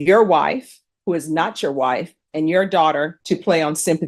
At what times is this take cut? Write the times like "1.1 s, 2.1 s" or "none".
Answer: 3.1 s